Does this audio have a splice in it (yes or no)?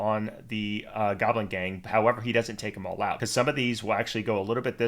yes